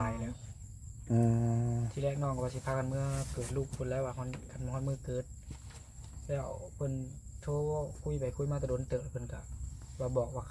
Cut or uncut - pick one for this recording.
uncut